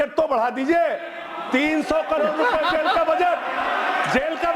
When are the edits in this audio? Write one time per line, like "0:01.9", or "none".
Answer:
none